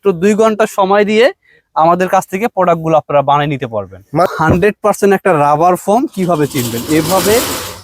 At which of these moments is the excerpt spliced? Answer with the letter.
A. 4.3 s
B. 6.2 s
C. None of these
A